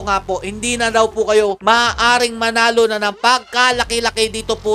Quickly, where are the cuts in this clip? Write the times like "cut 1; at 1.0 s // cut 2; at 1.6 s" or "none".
none